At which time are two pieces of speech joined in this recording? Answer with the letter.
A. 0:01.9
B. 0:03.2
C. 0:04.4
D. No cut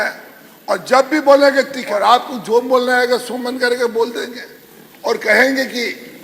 A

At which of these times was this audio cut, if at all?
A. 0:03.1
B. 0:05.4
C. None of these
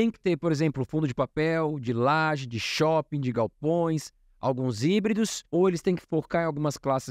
B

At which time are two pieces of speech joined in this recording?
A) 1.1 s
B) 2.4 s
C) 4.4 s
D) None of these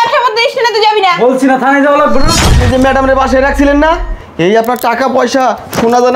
B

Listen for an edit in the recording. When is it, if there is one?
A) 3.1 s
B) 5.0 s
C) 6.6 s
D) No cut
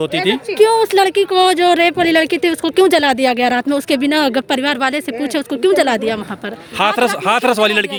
D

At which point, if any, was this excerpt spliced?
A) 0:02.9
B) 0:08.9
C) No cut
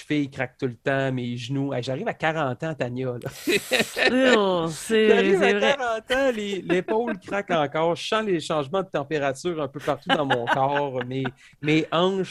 C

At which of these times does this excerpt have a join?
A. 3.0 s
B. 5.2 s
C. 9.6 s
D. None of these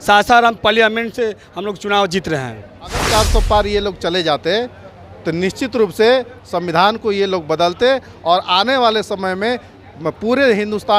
A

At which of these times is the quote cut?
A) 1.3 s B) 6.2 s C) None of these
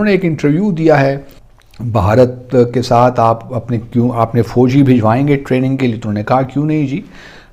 A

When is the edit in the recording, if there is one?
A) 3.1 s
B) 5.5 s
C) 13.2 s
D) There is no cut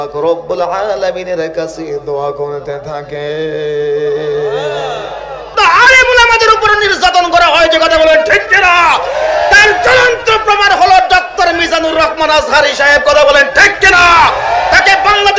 B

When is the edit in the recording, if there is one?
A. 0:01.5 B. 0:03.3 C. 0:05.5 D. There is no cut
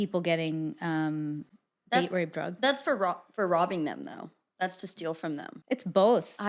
C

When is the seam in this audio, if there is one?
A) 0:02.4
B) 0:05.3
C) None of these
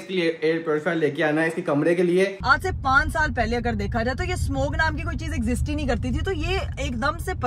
A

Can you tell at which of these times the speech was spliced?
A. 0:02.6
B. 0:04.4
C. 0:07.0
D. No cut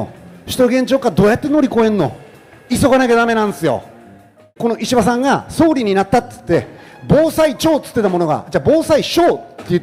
B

